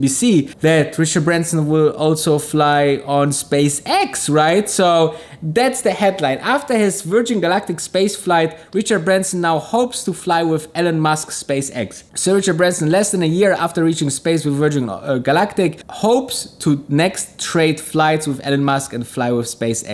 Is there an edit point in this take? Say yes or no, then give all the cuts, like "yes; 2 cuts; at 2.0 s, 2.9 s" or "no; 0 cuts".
no; 0 cuts